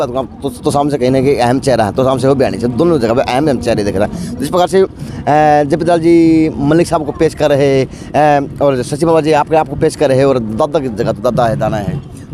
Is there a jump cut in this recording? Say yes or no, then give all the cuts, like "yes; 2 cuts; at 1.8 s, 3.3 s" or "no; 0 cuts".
no; 0 cuts